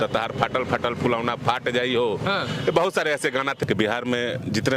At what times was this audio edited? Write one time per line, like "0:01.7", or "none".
0:03.6

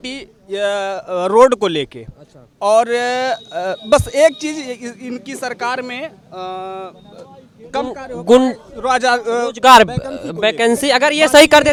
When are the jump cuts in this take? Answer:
none

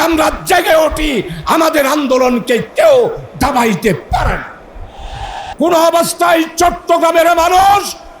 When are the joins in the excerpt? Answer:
0:05.4

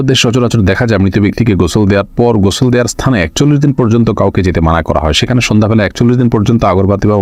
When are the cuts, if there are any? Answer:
none

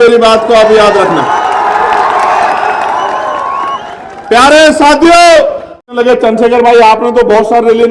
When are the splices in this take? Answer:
0:05.9

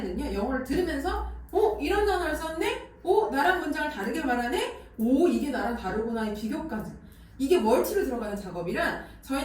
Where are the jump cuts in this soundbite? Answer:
none

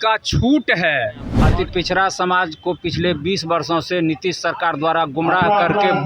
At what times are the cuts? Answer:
0:01.3

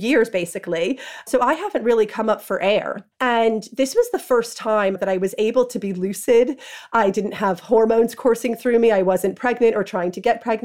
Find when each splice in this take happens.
0:01.2
0:03.0
0:05.0

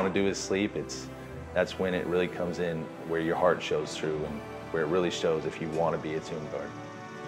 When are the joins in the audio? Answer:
none

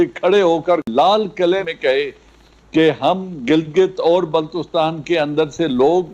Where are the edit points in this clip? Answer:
0:00.9
0:01.7

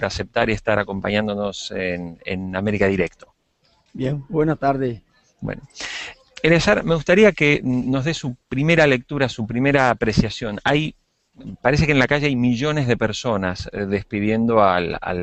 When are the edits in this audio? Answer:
none

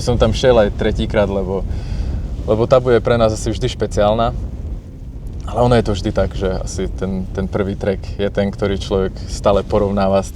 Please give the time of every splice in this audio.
none

